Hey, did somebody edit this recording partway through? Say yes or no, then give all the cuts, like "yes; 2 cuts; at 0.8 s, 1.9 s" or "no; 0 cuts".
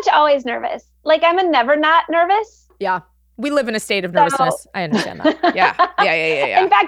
no; 0 cuts